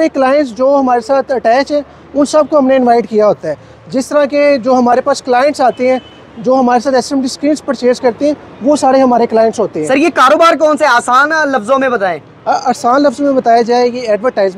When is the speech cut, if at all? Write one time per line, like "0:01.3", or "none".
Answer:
none